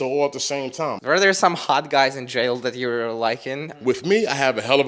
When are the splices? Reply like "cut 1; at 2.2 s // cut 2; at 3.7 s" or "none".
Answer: cut 1; at 1.0 s // cut 2; at 3.7 s